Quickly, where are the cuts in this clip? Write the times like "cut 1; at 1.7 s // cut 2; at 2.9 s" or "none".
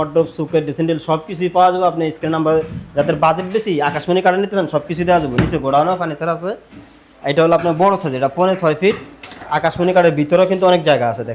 none